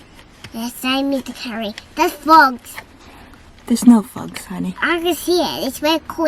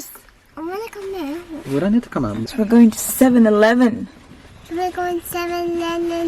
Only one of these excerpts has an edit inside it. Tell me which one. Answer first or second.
second